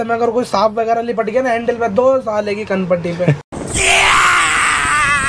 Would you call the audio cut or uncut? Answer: uncut